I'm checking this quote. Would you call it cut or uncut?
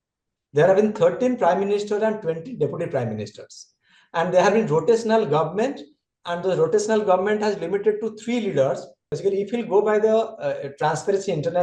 cut